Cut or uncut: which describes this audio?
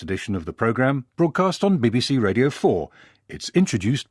uncut